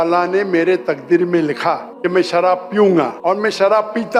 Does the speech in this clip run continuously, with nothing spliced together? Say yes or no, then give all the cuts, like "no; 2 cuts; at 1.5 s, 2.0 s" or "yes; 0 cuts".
no; 2 cuts; at 1.9 s, 3.2 s